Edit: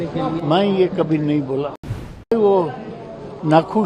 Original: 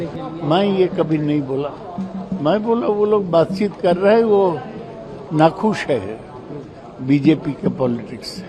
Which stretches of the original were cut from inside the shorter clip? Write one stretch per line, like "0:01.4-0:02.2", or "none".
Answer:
0:02.3-0:04.2